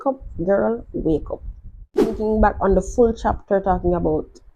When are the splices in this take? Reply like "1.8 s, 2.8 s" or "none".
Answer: 2.0 s